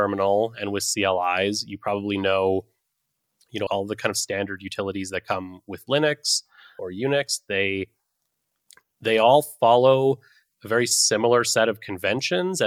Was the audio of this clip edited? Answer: yes; 2 cuts; at 3.7 s, 6.8 s

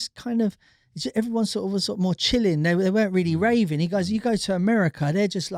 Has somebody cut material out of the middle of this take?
no; 0 cuts

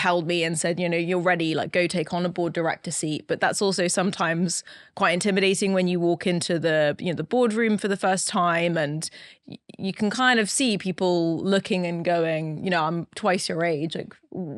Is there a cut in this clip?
no; 0 cuts

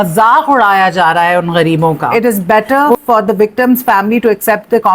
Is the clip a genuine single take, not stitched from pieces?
no; 1 cut; at 2.1 s

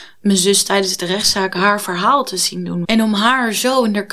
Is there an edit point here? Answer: yes; 1 cut; at 2.8 s

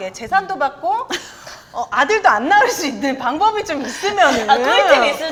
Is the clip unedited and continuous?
yes; 0 cuts

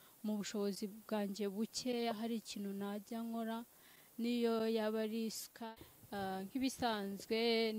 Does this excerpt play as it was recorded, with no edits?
no; 1 cut; at 5.6 s

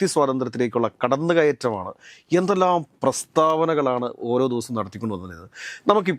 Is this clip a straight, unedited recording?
yes; 0 cuts

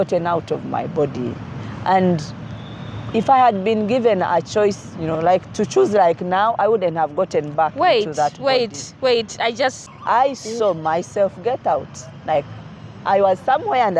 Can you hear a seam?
yes; 1 cut; at 9.9 s

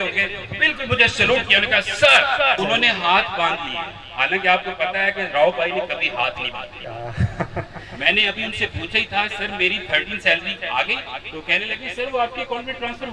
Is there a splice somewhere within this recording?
yes; 1 cut; at 2.6 s

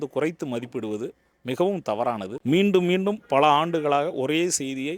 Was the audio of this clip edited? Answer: yes; 1 cut; at 2.3 s

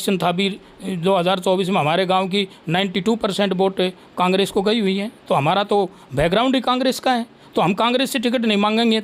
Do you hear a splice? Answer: no; 0 cuts

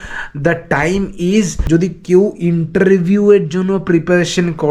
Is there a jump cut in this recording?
no; 0 cuts

